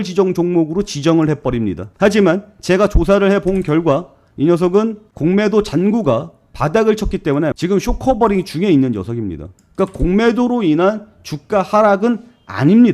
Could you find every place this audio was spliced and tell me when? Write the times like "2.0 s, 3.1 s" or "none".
1.9 s, 7.6 s